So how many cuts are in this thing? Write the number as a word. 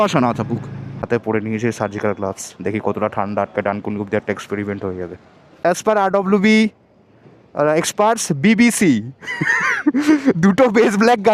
two